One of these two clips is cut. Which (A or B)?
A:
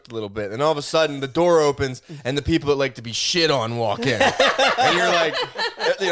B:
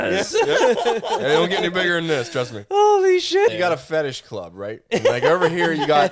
B